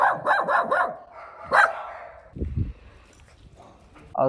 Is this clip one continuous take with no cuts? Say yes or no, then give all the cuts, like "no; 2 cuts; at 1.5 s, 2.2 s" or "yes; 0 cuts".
yes; 0 cuts